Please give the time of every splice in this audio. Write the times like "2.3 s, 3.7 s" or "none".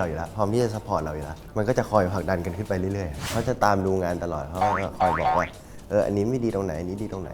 1.4 s, 3.5 s